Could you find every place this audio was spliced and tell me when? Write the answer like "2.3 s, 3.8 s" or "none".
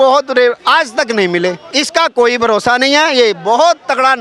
1.6 s